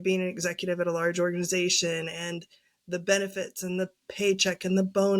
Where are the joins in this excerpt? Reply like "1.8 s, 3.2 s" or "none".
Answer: none